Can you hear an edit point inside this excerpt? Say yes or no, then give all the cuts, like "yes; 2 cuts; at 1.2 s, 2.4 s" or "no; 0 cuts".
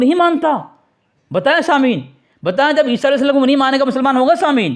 no; 0 cuts